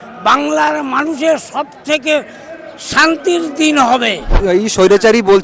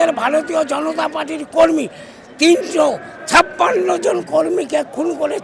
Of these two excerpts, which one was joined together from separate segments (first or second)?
first